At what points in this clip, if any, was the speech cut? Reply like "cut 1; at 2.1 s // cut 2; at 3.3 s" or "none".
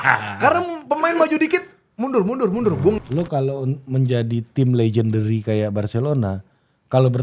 cut 1; at 3.0 s